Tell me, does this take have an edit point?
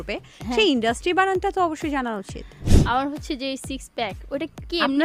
yes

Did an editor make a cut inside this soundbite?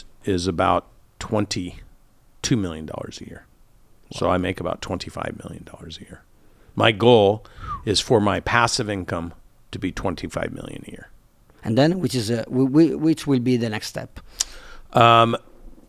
no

